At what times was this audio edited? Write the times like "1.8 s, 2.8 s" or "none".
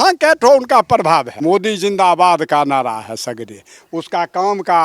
1.3 s